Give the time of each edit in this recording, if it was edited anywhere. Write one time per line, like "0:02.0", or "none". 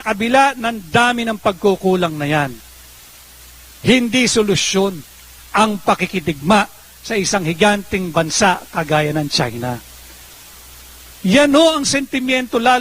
0:01.8